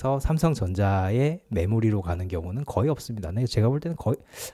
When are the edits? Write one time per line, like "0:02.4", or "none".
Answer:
none